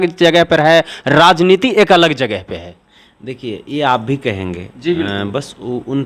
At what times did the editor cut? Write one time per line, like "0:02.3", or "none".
none